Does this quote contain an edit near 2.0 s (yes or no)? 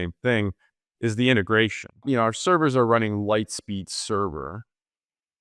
yes